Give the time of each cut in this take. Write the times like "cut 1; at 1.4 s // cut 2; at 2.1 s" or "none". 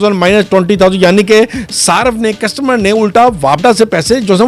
none